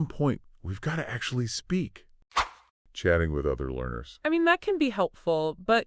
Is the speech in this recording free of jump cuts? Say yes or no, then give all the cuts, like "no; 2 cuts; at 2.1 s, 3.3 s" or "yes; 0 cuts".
no; 1 cut; at 2.4 s